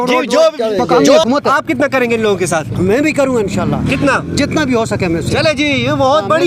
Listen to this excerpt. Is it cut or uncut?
cut